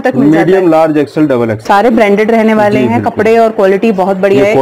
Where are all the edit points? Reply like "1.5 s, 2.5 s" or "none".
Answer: 1.6 s